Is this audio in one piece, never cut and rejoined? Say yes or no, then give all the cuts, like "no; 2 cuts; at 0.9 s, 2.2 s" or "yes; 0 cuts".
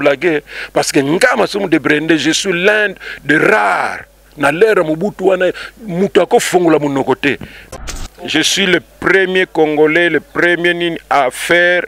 no; 1 cut; at 7.6 s